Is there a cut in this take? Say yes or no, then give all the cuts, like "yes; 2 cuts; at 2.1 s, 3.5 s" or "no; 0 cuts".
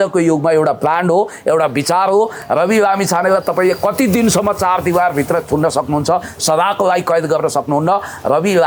no; 0 cuts